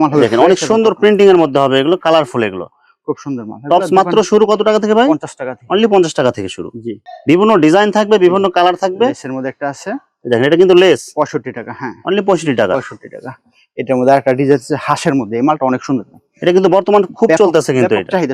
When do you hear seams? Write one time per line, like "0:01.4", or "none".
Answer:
none